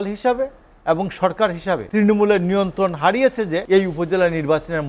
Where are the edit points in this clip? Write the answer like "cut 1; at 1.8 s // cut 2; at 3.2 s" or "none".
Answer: cut 1; at 1.9 s // cut 2; at 3.6 s

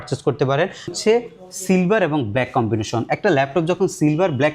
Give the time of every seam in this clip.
cut 1; at 0.9 s

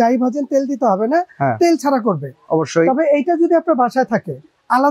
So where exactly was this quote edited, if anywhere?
cut 1; at 2.3 s

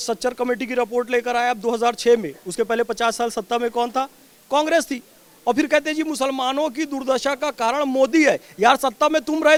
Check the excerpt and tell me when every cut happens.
none

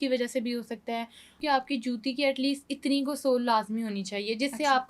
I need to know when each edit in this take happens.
cut 1; at 1.3 s

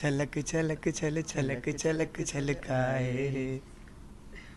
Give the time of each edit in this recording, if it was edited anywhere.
none

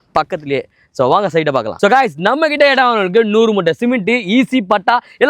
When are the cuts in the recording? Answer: cut 1; at 1.7 s

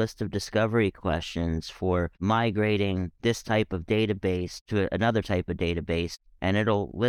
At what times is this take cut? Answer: cut 1; at 6.2 s

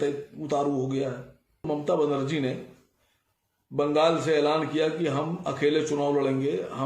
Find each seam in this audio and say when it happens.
cut 1; at 1.6 s

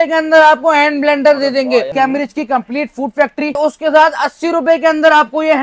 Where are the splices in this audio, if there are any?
cut 1; at 1.9 s // cut 2; at 3.6 s

